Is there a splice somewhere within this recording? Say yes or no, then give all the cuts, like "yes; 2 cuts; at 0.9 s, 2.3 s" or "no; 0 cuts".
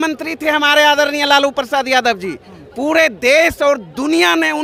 no; 0 cuts